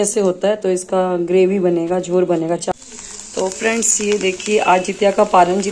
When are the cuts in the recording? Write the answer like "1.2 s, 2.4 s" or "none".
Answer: 2.7 s